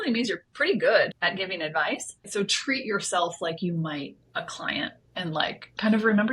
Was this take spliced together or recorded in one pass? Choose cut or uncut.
cut